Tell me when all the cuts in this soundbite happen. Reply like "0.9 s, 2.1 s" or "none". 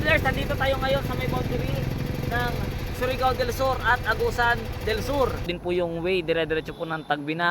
5.5 s